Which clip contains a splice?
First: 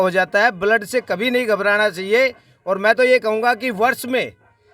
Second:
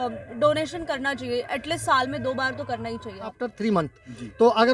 second; 1 cut; at 3.3 s

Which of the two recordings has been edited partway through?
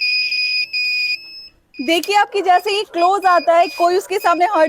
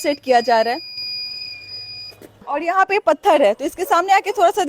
second; 1 cut; at 2.4 s

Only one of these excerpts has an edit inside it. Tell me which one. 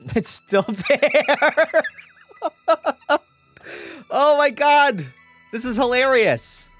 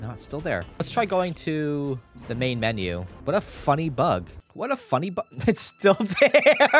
second; 4 cuts; at 0.8 s, 2.1 s, 3.1 s, 4.4 s

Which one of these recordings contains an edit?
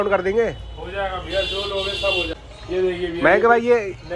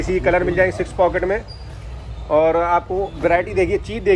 first; 1 cut; at 2.3 s

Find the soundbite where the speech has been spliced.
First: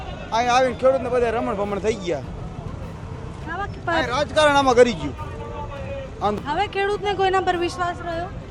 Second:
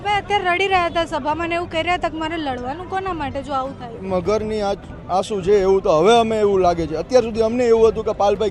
first; 1 cut; at 6.4 s

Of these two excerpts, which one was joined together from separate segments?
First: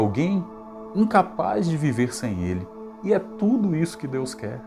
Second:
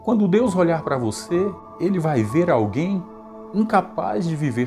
second; 1 cut; at 1.6 s

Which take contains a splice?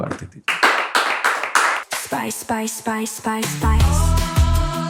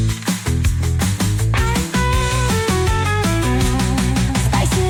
first; 1 cut; at 1.8 s

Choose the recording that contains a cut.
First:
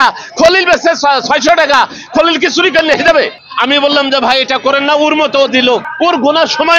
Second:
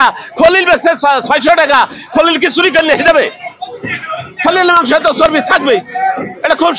first; 2 cuts; at 3.4 s, 5.9 s

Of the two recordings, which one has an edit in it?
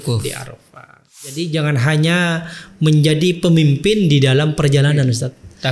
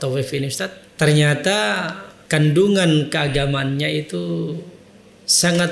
first; 1 cut; at 1.3 s

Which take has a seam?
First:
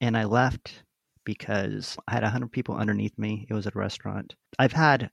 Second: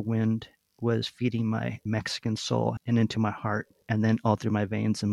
second; 2 cuts; at 2.8 s, 3.7 s

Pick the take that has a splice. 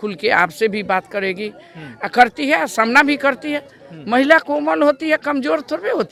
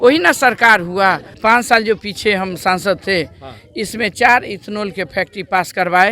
second; 1 cut; at 1.3 s

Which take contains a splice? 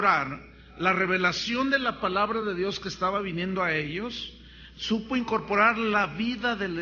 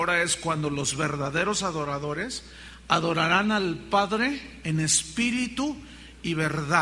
first; 1 cut; at 5.8 s

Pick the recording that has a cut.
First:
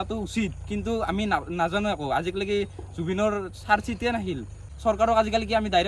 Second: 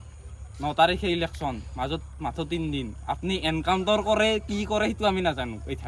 first; 1 cut; at 4.6 s

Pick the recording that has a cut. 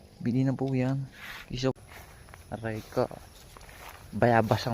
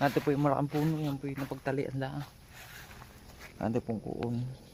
first; 1 cut; at 1.7 s

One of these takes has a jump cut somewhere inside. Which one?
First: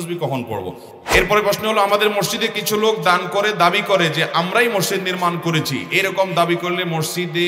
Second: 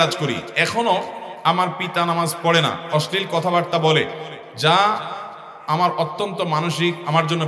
first; 1 cut; at 0.9 s

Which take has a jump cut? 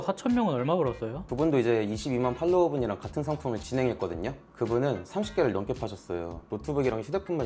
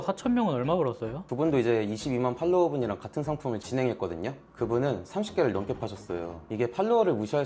first; 1 cut; at 6.5 s

